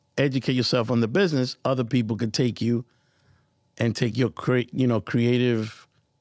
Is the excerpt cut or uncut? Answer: uncut